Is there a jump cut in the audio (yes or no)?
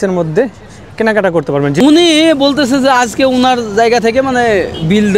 yes